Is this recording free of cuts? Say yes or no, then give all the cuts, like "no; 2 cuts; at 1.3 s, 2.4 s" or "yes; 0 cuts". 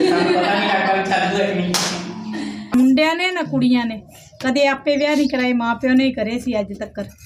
no; 1 cut; at 2.7 s